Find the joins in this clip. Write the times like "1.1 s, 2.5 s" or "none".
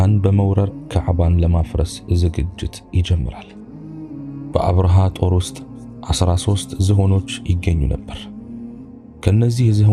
none